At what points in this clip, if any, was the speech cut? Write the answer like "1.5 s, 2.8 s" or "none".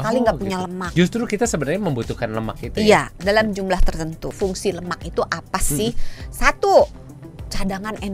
4.3 s